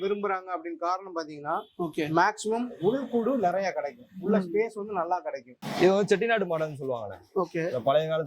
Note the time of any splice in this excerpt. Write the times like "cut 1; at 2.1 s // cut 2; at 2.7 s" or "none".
cut 1; at 5.6 s